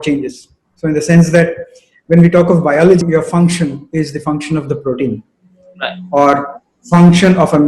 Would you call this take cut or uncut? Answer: cut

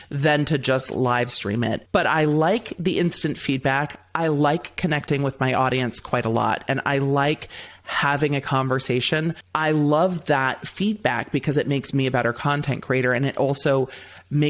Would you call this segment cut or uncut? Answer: cut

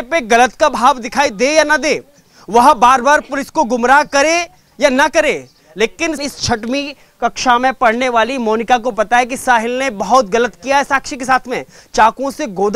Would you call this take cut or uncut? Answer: cut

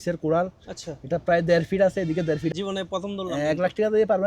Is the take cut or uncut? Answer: cut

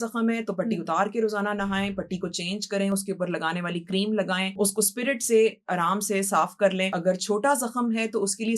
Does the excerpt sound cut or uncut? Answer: cut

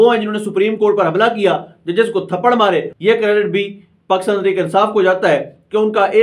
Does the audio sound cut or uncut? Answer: cut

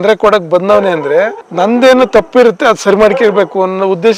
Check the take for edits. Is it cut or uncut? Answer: uncut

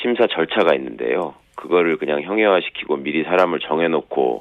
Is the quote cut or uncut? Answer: cut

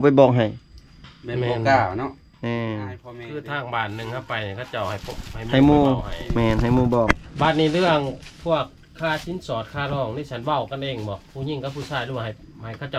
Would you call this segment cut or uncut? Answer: uncut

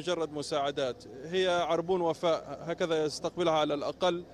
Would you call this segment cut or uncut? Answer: uncut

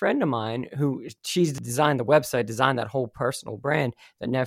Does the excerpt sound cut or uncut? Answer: cut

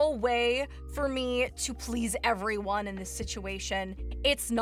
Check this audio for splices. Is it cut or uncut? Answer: uncut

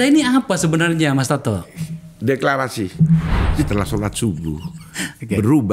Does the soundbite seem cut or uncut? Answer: cut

